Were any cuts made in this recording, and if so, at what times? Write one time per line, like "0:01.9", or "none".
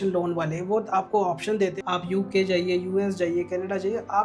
0:01.8